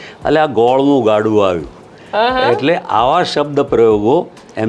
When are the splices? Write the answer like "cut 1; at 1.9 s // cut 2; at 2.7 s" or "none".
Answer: none